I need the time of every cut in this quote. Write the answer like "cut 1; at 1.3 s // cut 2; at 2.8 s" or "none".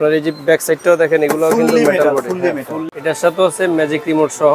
cut 1; at 2.7 s